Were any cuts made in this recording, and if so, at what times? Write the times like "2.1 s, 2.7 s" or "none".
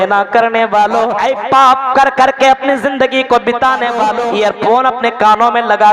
1.2 s, 4.2 s